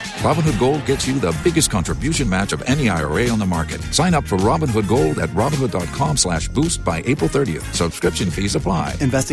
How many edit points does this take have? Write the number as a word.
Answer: zero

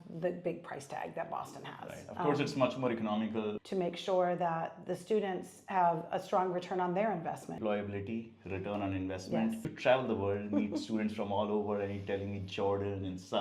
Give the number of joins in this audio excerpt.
three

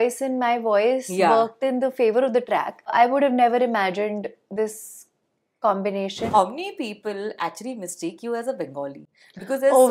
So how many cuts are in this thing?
two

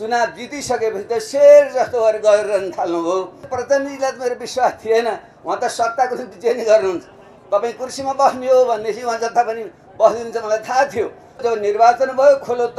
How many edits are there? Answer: two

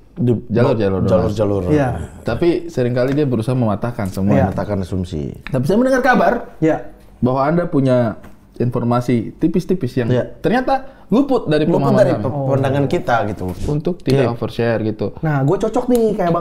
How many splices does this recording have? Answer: one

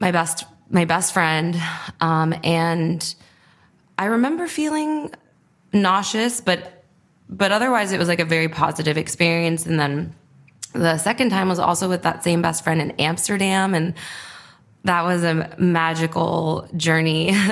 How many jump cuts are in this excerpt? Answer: zero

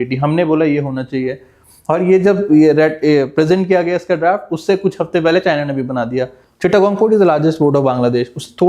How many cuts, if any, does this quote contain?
one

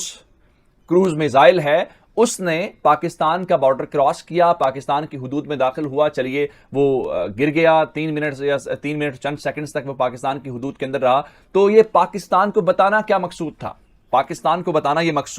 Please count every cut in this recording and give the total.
zero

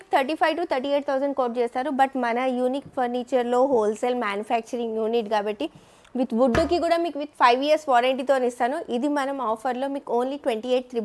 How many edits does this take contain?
zero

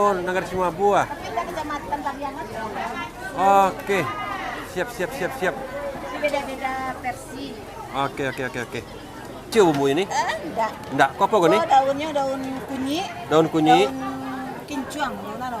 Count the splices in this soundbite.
one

